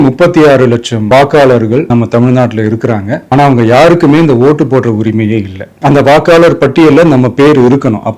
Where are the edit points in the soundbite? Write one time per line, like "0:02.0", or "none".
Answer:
0:00.9
0:05.6